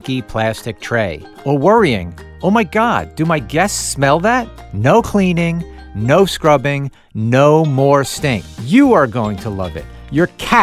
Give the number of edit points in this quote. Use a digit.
2